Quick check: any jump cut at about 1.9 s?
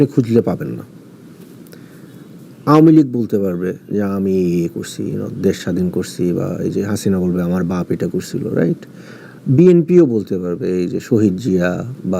yes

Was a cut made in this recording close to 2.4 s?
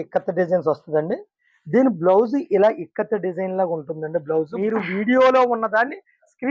no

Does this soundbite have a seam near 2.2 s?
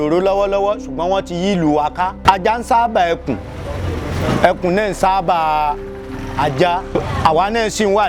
yes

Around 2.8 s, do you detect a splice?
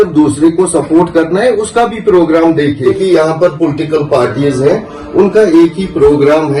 yes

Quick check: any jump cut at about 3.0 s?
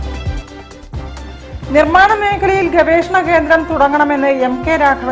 no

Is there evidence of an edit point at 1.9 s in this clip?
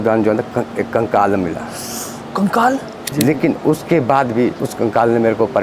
no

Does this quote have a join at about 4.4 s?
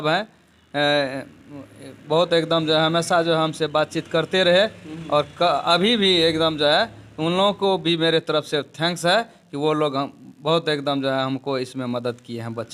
no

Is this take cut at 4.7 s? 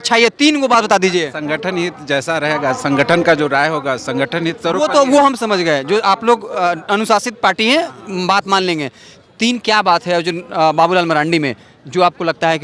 no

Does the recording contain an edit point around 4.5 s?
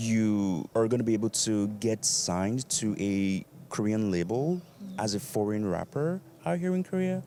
no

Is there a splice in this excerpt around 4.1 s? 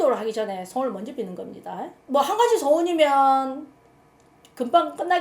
no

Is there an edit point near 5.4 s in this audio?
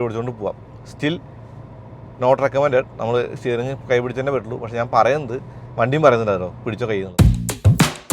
no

